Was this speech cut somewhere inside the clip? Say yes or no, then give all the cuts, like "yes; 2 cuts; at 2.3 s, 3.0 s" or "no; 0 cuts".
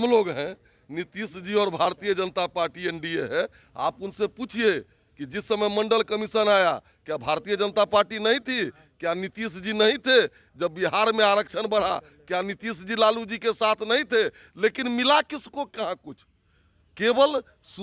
no; 0 cuts